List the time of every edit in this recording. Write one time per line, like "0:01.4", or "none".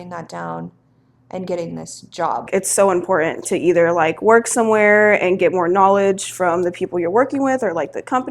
0:02.5